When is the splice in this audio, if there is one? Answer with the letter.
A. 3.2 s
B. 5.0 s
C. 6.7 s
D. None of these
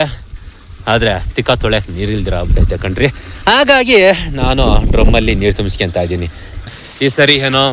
C